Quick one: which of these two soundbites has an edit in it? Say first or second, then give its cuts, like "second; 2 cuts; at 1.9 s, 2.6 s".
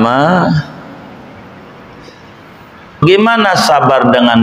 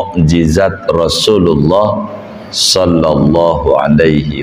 first; 1 cut; at 3.0 s